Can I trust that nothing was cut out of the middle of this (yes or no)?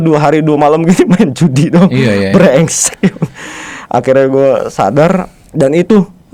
no